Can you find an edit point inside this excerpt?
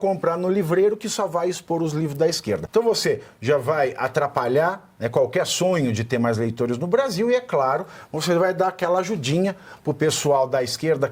yes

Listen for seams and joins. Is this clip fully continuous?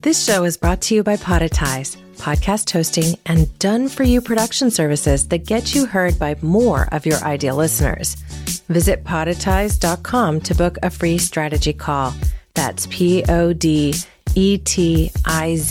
yes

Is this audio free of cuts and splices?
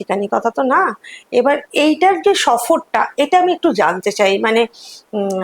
yes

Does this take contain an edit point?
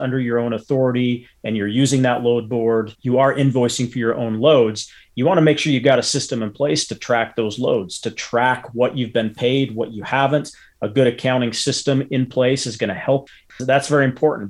no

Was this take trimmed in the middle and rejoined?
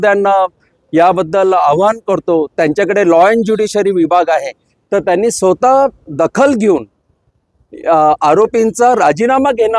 no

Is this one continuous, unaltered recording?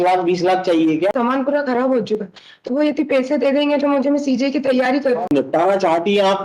no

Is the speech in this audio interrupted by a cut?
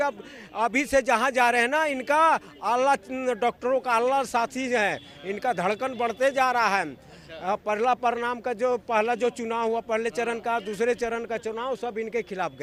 no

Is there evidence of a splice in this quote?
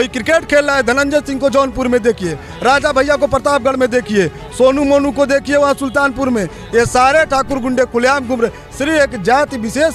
no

